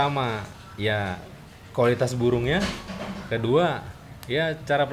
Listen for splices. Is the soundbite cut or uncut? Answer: uncut